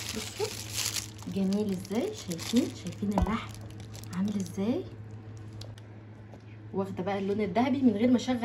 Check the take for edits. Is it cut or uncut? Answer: cut